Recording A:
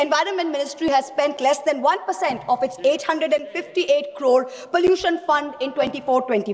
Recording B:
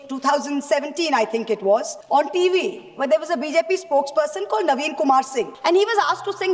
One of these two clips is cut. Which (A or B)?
B